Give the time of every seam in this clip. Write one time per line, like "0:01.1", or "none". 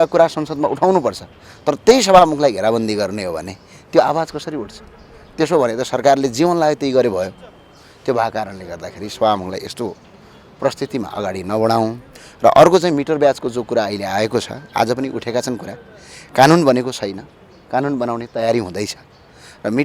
none